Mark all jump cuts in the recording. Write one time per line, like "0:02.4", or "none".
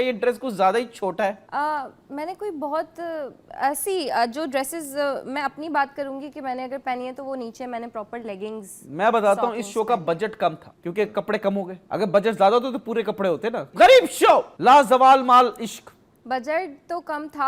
none